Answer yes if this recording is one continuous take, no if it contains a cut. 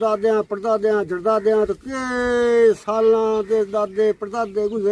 yes